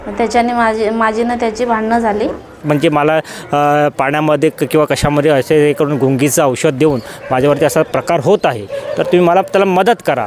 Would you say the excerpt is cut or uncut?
cut